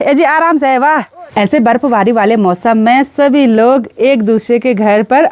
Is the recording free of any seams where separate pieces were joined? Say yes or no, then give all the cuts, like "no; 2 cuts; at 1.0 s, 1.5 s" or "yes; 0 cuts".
no; 1 cut; at 1.2 s